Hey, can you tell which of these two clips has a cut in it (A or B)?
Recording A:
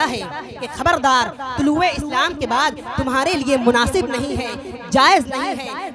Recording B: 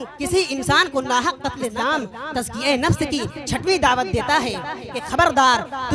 B